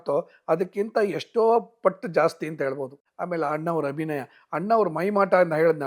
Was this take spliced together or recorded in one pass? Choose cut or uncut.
uncut